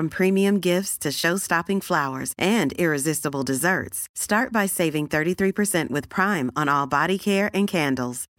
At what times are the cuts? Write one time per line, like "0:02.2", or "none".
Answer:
none